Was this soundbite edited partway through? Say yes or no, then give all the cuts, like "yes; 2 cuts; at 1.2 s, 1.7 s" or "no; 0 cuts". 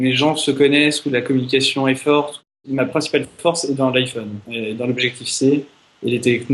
yes; 1 cut; at 2.4 s